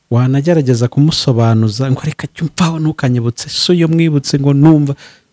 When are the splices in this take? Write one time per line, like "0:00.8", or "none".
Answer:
none